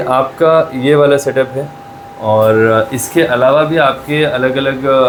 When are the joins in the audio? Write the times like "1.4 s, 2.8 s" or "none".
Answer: none